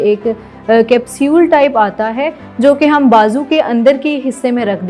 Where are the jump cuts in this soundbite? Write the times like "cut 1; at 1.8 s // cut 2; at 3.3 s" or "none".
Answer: none